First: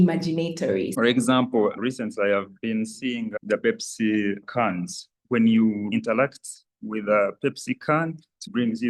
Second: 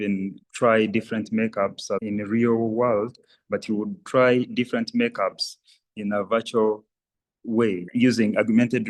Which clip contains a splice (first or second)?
first